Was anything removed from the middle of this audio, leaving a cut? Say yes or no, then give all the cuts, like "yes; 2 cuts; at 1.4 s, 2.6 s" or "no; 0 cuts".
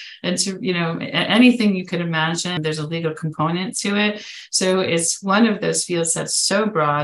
yes; 1 cut; at 2.6 s